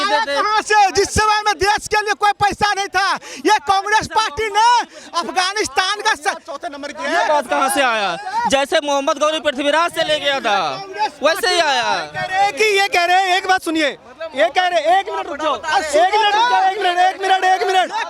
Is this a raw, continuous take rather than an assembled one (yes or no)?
yes